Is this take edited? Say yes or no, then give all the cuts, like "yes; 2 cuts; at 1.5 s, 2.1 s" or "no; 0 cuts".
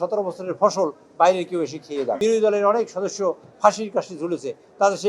yes; 1 cut; at 2.2 s